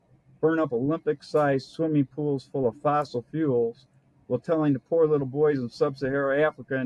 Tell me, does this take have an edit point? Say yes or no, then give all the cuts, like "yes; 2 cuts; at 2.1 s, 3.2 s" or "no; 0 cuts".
no; 0 cuts